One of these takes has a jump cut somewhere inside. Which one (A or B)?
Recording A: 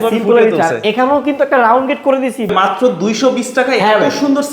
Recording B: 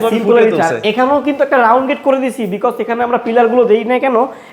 A